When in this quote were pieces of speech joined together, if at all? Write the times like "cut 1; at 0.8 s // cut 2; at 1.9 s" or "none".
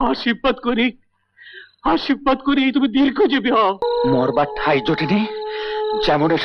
cut 1; at 3.8 s